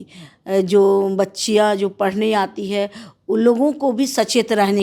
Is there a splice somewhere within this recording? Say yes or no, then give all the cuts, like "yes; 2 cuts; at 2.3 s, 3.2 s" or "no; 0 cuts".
no; 0 cuts